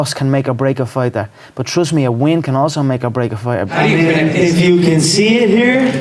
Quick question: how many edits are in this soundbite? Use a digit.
1